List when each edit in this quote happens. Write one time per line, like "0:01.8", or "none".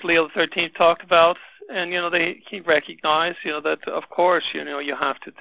none